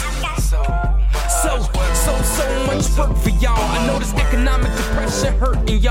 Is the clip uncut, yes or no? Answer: yes